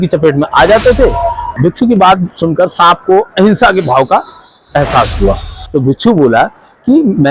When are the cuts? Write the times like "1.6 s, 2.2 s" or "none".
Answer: 1.6 s, 5.5 s

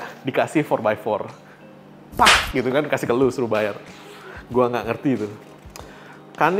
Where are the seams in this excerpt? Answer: none

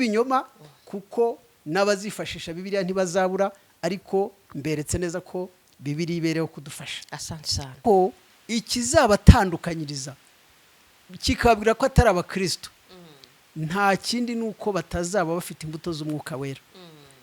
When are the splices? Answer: 7.7 s

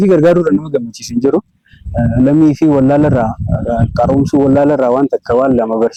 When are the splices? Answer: none

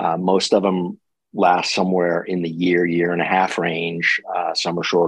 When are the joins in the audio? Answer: none

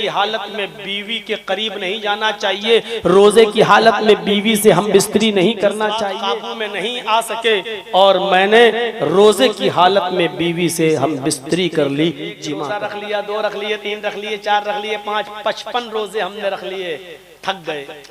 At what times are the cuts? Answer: 6.1 s, 12.7 s

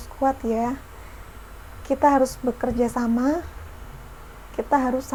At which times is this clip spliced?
none

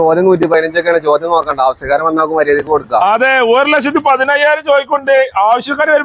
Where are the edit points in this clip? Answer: none

